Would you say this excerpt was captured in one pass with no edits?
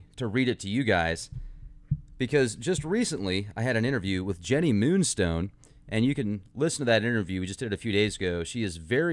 no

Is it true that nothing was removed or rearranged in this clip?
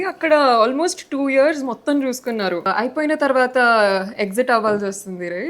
no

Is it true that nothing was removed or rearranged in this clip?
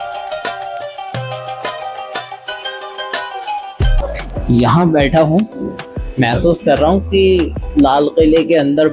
no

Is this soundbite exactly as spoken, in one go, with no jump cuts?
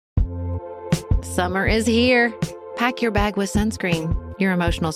no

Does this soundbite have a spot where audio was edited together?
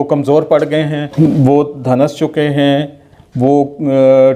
yes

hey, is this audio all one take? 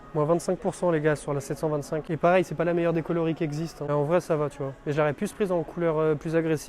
yes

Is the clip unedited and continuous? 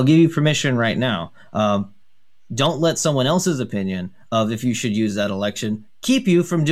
yes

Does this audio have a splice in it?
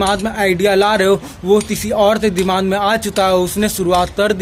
no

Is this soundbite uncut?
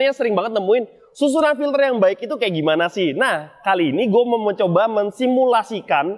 yes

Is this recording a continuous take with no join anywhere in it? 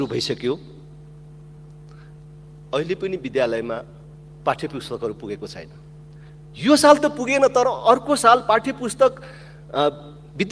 yes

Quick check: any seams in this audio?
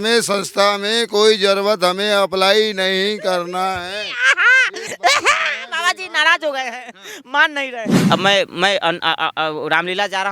yes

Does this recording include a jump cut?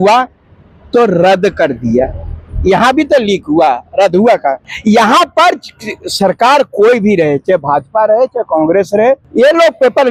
no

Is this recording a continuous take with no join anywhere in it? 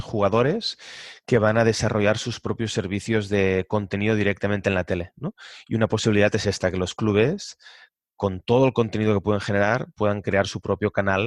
yes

